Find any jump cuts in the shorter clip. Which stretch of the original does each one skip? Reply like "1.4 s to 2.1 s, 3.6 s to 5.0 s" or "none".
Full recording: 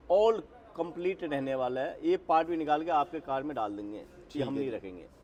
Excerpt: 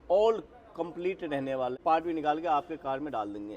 1.8 s to 2.2 s

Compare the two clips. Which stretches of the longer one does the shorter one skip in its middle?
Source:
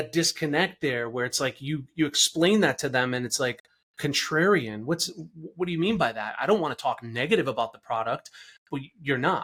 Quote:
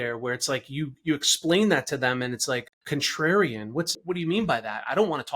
3.7 s to 3.9 s, 5.1 s to 5.5 s

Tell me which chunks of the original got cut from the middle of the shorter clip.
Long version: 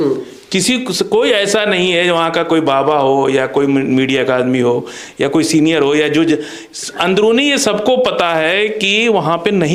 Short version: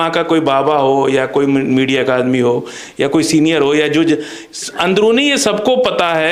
none

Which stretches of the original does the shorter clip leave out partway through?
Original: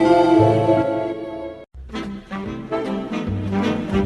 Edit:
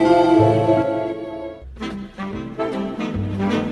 1.7 s to 1.8 s

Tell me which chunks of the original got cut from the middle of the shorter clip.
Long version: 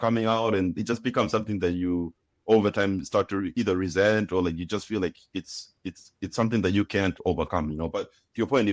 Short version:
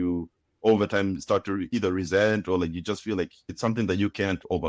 5.3 s to 6.2 s

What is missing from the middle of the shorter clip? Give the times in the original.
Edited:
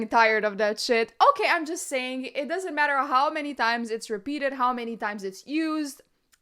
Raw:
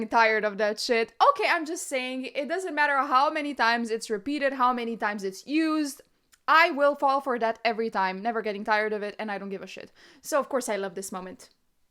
none

